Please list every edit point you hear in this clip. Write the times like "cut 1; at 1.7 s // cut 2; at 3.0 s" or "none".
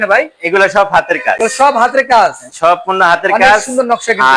none